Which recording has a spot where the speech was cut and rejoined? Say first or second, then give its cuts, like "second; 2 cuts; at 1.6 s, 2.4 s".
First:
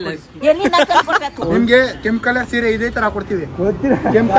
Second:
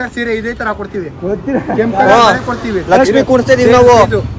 first; 1 cut; at 1.4 s